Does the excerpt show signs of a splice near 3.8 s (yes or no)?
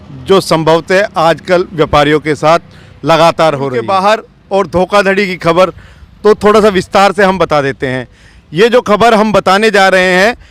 yes